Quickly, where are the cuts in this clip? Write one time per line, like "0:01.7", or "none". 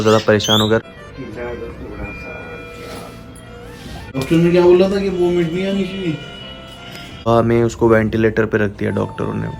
0:00.9
0:04.1
0:07.3